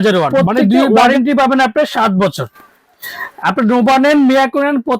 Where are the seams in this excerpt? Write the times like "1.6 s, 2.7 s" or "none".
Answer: 1.0 s